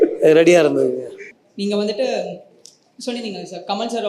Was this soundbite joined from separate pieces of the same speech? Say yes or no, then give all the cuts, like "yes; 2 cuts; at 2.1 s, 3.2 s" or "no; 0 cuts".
no; 0 cuts